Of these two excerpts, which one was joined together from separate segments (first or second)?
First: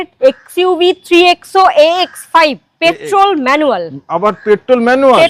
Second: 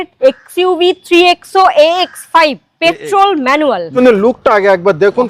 second